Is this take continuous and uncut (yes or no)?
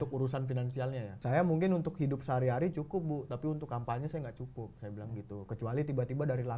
no